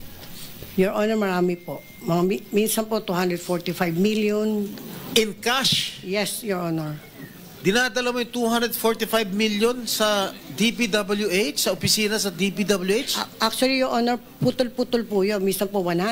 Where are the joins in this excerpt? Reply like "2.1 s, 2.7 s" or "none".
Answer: 7.9 s, 13.2 s